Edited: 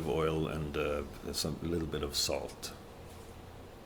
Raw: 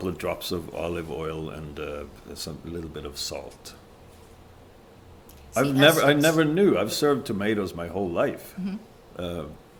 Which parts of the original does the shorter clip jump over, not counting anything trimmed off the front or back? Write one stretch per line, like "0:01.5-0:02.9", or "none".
none